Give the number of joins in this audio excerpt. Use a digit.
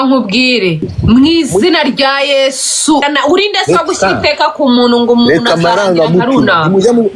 2